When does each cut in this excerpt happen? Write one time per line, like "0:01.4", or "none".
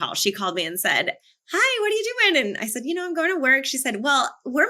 none